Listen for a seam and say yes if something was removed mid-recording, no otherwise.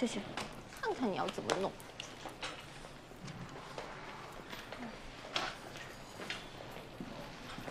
yes